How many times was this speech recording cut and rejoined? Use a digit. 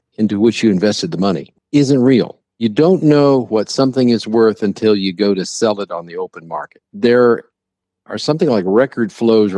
1